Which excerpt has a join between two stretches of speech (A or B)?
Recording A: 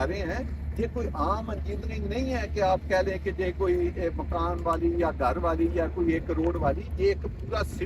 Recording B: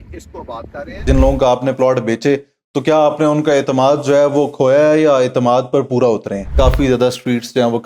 B